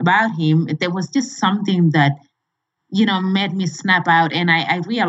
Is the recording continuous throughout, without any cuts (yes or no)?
yes